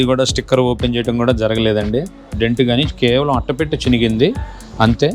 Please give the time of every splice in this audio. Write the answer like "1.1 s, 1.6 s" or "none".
2.3 s